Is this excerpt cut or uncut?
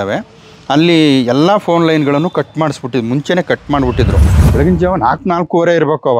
cut